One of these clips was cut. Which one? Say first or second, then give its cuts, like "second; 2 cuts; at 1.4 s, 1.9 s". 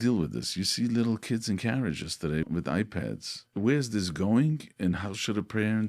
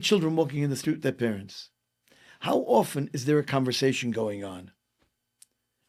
first; 2 cuts; at 2.4 s, 3.4 s